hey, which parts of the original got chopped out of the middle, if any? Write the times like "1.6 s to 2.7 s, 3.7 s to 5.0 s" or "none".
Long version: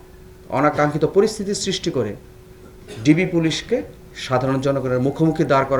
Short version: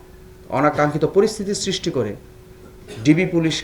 none

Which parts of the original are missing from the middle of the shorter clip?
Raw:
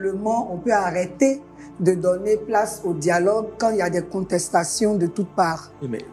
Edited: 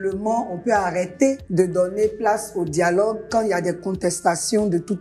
1.4 s to 1.7 s

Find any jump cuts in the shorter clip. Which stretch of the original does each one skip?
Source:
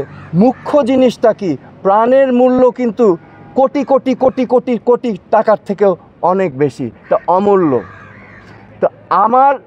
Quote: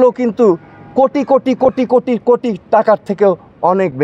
none

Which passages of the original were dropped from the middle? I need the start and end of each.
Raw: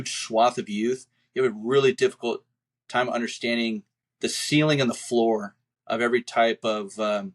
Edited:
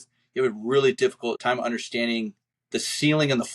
2.4 s to 2.9 s

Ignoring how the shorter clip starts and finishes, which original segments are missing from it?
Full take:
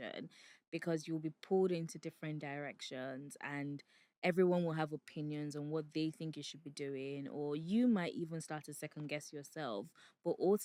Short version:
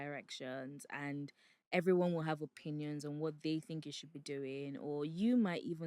none

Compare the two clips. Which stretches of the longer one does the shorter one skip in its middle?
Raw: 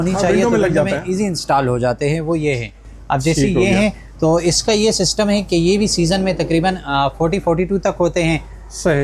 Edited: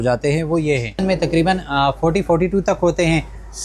2.8 s to 6.2 s

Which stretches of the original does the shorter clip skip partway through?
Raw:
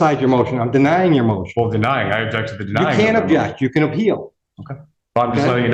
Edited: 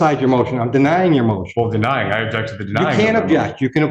none

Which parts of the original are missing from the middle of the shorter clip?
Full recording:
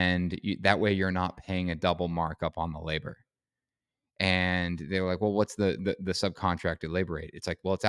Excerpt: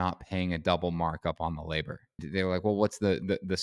3.4 s to 4.8 s

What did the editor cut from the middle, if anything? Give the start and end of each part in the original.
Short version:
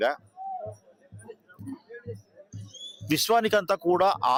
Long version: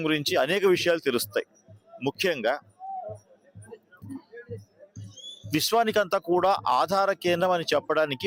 none

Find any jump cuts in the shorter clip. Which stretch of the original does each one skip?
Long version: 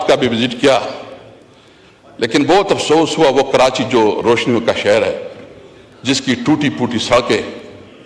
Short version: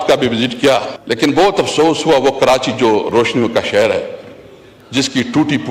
1.0 s to 2.1 s

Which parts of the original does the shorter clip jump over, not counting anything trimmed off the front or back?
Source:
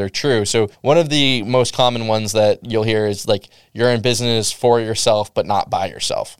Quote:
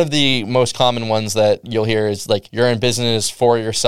3.5 s to 3.7 s

